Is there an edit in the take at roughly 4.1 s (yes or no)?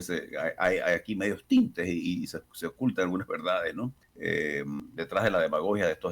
yes